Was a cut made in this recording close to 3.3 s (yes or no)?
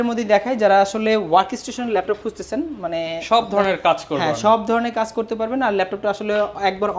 no